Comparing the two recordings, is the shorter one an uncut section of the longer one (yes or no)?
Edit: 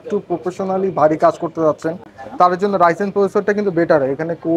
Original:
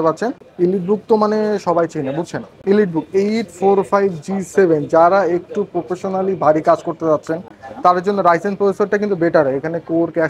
yes